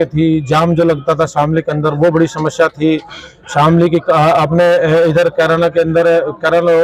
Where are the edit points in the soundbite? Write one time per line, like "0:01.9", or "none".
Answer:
none